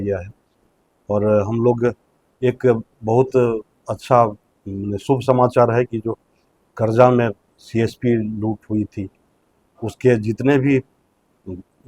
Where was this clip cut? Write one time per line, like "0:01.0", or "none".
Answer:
none